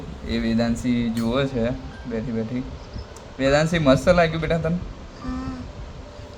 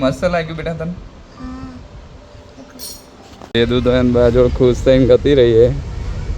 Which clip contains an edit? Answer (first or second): second